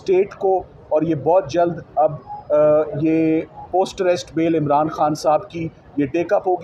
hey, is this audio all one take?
yes; 0 cuts

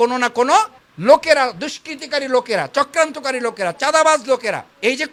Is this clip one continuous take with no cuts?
yes; 0 cuts

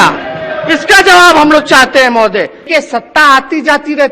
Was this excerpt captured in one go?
no; 1 cut; at 2.7 s

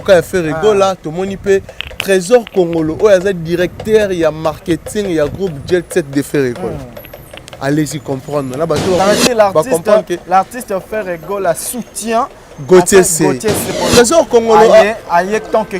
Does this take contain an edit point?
yes; 2 cuts; at 9.0 s, 13.7 s

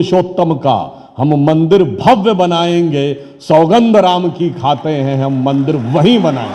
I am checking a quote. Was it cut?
no; 0 cuts

